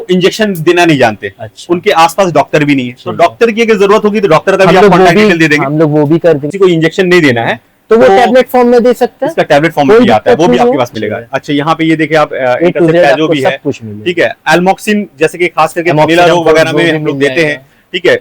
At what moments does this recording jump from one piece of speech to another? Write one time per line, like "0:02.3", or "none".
0:06.5
0:10.9